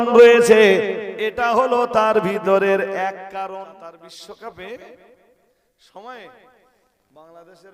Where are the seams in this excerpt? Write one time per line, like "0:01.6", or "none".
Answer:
0:03.5